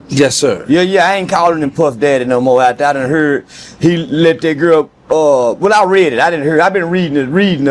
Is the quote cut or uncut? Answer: uncut